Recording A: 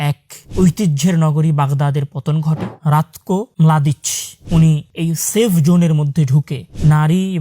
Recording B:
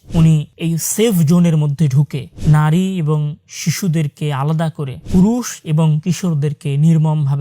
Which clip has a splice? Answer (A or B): A